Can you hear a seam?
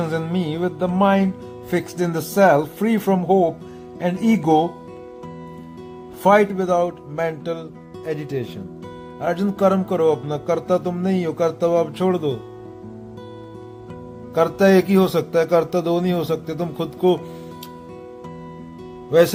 no; 0 cuts

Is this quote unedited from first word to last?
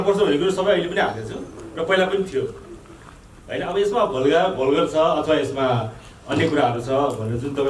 yes; 0 cuts

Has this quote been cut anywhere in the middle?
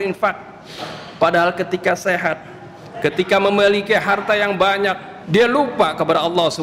no; 0 cuts

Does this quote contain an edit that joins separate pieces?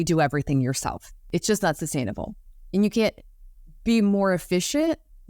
yes; 1 cut; at 1.1 s

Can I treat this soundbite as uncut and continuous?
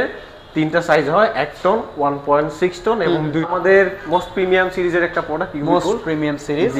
no; 1 cut; at 3.5 s

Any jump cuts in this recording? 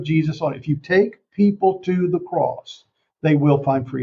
no; 0 cuts

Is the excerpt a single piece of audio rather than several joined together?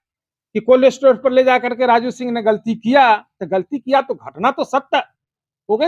yes; 0 cuts

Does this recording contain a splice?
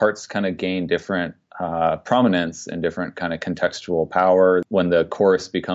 yes; 1 cut; at 4.6 s

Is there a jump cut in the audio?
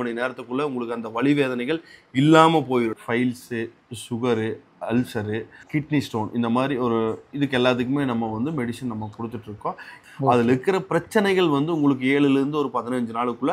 yes; 3 cuts; at 3.0 s, 5.6 s, 9.9 s

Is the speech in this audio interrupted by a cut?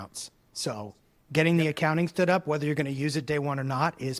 no; 0 cuts

